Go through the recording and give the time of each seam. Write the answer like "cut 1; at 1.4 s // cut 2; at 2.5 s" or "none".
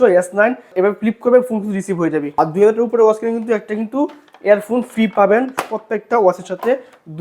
cut 1; at 2.3 s